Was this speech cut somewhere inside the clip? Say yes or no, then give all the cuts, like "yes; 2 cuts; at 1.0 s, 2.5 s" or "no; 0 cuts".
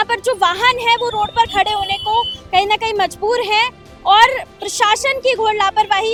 no; 0 cuts